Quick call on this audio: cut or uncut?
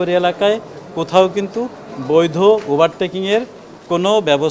uncut